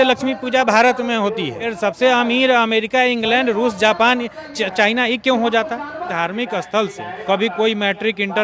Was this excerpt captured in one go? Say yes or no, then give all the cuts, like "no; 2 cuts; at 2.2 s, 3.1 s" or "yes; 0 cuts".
no; 3 cuts; at 1.7 s, 6.1 s, 7.1 s